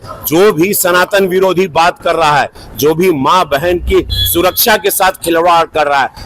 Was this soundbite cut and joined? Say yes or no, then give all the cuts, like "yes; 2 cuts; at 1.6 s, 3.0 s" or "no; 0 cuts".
no; 0 cuts